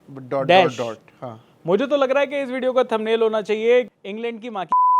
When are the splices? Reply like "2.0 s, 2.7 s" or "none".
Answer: 3.9 s